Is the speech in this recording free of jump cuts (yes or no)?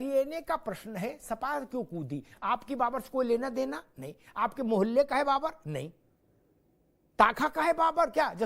no